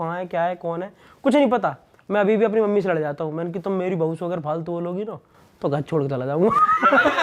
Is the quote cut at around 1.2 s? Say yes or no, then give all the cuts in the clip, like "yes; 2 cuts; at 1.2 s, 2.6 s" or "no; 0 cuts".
no; 0 cuts